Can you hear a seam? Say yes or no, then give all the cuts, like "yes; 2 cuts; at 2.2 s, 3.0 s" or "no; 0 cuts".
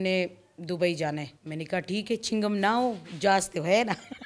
yes; 1 cut; at 1.4 s